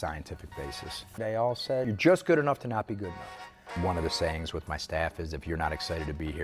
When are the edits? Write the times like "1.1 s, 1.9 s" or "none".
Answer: 1.1 s, 1.9 s, 3.7 s